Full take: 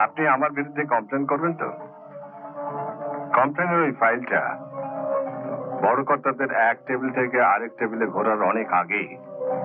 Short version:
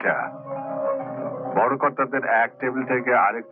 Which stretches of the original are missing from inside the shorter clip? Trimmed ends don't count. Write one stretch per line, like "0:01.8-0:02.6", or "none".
none